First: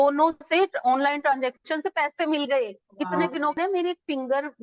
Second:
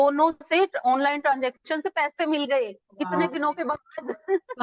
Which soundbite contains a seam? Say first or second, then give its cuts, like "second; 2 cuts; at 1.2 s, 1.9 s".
first; 1 cut; at 3.6 s